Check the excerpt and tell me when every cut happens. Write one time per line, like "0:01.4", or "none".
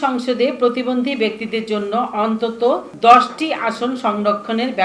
0:02.9